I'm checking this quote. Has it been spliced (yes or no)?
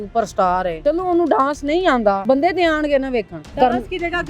yes